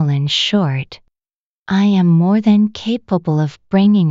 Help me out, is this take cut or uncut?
uncut